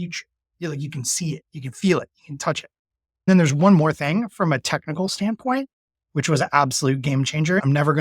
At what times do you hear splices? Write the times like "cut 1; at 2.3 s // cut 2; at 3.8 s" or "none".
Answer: cut 1; at 3.3 s